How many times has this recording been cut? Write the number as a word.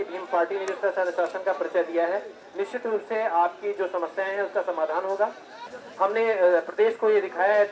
one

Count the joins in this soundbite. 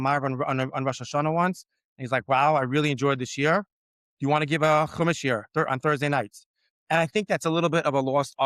zero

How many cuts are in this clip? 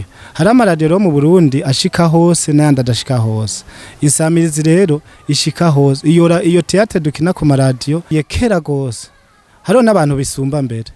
one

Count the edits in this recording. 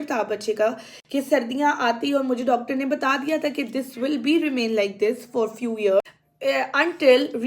one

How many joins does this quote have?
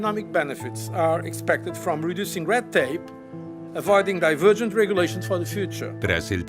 one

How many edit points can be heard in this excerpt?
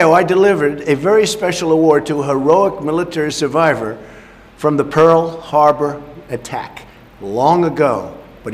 one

